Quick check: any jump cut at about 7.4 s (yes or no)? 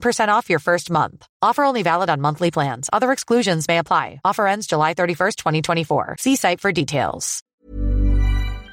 yes